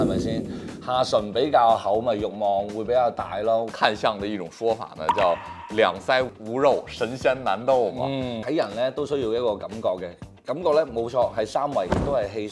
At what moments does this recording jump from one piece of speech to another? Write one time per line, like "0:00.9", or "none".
0:03.7
0:06.4
0:08.4